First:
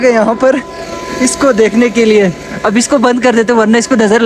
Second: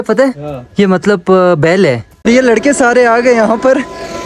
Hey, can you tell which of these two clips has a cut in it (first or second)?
second